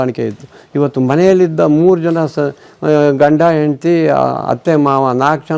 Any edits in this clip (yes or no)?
no